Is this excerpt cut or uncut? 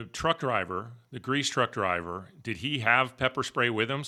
uncut